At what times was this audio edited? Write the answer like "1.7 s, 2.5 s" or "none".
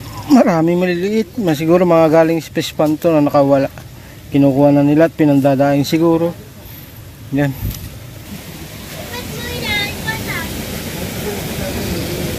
8.2 s